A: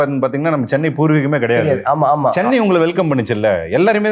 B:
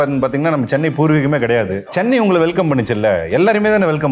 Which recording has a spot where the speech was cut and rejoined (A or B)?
B